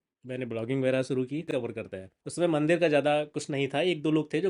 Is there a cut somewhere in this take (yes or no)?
yes